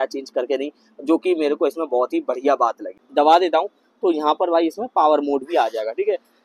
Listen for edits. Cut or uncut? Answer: cut